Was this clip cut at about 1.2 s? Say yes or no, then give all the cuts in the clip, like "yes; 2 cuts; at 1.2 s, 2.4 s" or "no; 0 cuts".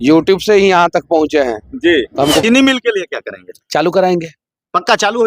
no; 1 cut; at 2.4 s